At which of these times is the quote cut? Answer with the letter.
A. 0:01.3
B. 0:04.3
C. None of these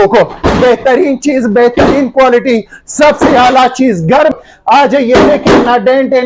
B